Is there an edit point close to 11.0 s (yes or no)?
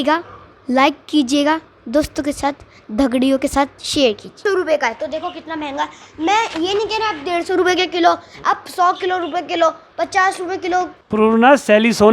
yes